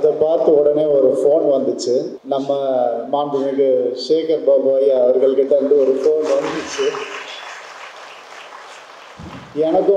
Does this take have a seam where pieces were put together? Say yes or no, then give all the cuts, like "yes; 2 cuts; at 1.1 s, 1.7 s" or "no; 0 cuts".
yes; 1 cut; at 2.2 s